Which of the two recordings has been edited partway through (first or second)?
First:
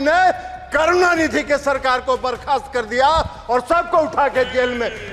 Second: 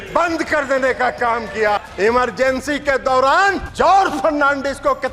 second